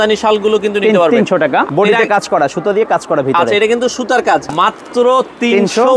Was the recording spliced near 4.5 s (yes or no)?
yes